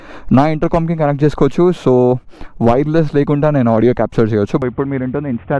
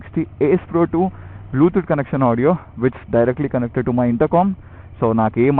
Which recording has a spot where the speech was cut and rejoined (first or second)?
first